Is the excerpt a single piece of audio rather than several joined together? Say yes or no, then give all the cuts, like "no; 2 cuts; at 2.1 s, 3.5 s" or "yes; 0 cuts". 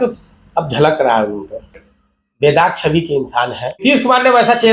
no; 2 cuts; at 1.8 s, 3.8 s